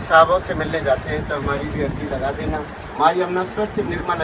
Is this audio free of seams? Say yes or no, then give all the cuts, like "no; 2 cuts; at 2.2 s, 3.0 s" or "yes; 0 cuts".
yes; 0 cuts